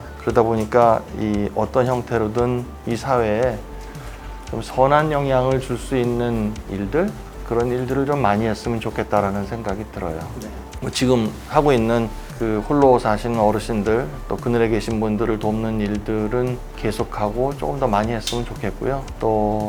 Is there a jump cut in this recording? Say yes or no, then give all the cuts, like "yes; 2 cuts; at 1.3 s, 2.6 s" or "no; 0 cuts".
no; 0 cuts